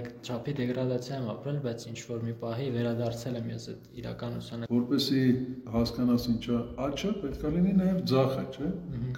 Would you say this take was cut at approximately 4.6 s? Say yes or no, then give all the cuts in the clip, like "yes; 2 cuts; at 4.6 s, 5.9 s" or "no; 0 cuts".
yes; 1 cut; at 4.6 s